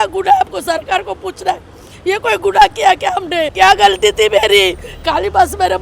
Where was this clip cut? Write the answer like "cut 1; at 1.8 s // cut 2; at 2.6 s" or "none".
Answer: cut 1; at 3.5 s